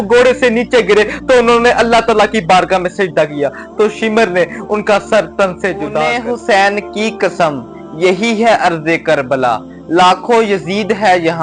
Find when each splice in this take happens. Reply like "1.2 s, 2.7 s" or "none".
6.2 s